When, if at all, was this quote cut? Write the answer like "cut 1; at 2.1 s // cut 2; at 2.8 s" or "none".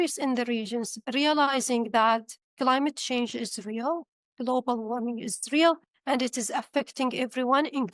none